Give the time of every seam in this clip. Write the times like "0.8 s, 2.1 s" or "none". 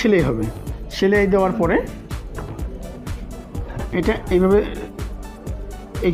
none